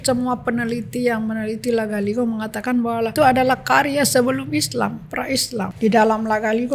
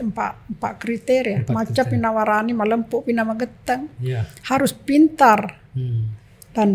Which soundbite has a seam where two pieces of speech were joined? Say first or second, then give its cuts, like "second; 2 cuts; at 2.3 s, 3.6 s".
first; 2 cuts; at 3.1 s, 5.7 s